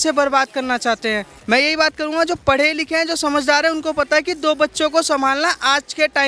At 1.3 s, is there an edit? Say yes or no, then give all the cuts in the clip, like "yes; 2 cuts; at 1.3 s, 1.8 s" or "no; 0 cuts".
yes; 1 cut; at 1.3 s